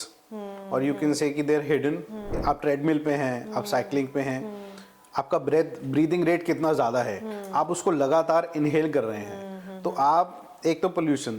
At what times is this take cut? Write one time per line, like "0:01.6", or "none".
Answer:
0:02.4